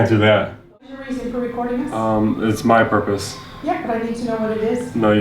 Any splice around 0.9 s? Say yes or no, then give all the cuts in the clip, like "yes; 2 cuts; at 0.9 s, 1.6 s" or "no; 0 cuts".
yes; 1 cut; at 0.9 s